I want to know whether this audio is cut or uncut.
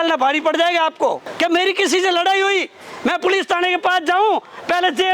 cut